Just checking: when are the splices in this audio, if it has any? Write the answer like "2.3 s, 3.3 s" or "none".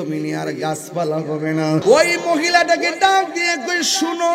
1.8 s